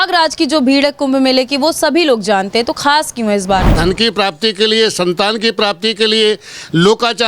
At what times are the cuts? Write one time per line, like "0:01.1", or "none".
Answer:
0:03.8